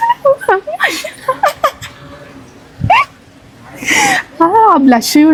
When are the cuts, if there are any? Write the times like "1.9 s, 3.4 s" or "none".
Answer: none